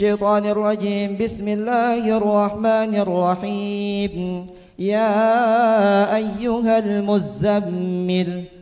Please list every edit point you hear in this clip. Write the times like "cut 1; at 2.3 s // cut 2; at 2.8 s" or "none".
none